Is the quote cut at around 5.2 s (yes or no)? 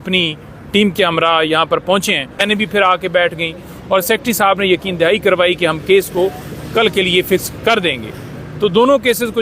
no